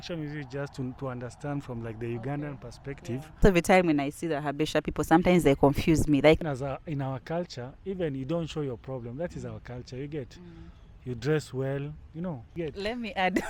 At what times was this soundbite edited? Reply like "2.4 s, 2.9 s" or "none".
3.4 s, 6.4 s, 12.6 s